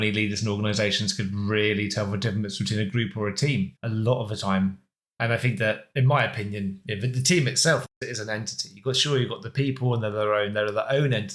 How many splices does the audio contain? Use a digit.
0